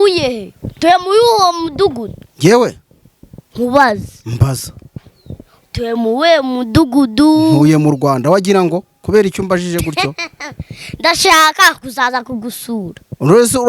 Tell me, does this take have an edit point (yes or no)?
no